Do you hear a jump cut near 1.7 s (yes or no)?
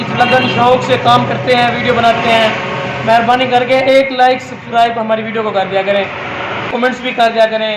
no